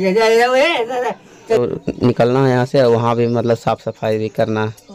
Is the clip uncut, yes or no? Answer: no